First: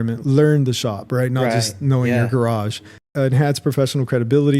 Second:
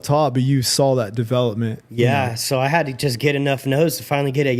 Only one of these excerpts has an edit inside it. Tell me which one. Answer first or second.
first